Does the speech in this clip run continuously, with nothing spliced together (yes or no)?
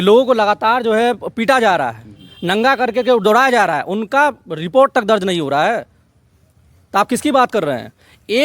yes